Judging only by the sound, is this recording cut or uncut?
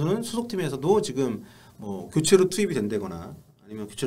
uncut